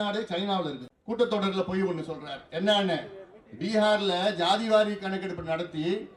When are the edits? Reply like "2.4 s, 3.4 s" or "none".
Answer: 0.9 s